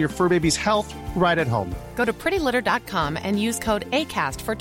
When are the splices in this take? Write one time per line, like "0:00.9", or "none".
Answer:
none